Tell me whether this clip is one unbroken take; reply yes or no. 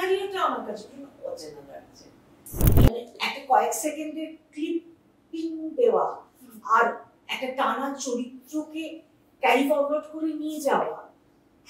no